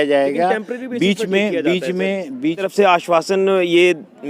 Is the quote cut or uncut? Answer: cut